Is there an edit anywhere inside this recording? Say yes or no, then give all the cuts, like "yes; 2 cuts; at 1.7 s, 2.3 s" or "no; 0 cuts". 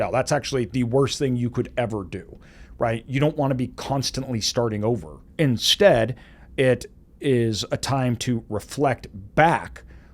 yes; 1 cut; at 5.2 s